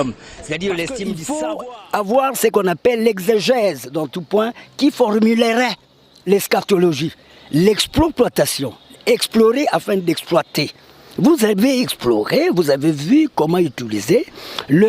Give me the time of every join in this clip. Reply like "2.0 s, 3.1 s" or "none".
1.2 s